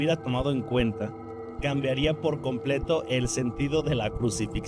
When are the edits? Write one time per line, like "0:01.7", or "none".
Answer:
none

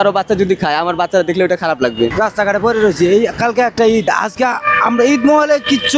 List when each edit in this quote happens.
0:02.1

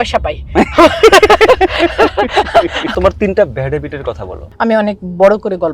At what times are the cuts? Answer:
0:02.9
0:04.6

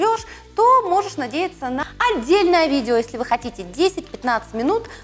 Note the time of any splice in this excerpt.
0:01.8

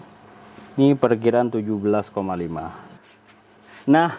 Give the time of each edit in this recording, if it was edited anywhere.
0:02.8

